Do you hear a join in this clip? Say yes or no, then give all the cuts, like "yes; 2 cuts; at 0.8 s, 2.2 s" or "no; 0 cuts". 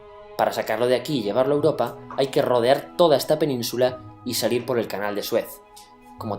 yes; 1 cut; at 4.5 s